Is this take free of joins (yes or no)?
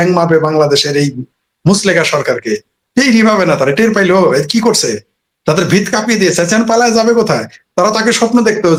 yes